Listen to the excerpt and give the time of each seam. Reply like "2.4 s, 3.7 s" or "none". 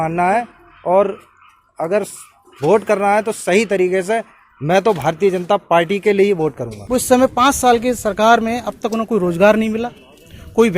6.7 s